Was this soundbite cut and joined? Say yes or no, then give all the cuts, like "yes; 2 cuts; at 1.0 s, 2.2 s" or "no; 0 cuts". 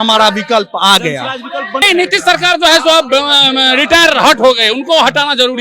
yes; 1 cut; at 1.8 s